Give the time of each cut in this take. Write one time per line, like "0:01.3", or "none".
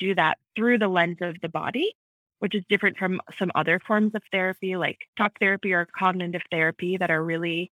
0:05.0